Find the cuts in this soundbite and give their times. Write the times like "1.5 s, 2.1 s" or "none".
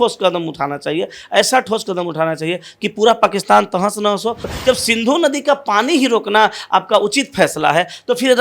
4.4 s